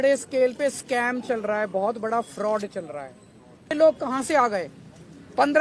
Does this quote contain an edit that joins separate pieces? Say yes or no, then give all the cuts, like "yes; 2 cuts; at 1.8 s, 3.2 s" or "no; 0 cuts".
yes; 1 cut; at 3.7 s